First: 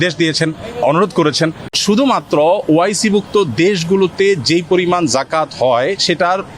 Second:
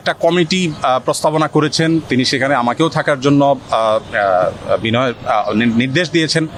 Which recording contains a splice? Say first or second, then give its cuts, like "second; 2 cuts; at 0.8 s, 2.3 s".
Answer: first; 1 cut; at 1.7 s